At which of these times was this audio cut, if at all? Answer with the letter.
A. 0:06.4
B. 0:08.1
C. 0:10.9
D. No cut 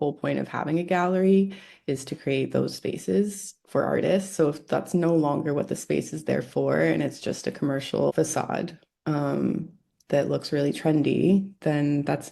B